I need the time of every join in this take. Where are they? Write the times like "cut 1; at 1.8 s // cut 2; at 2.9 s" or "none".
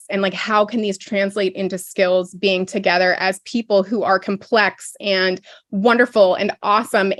none